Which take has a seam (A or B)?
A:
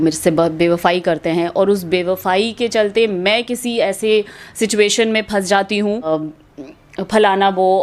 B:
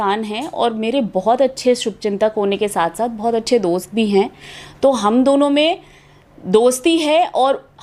A